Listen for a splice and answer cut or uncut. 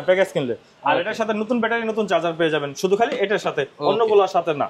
uncut